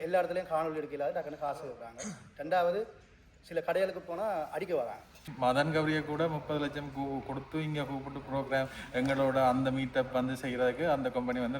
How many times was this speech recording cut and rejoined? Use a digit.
1